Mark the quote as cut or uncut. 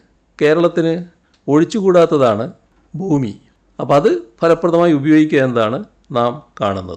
uncut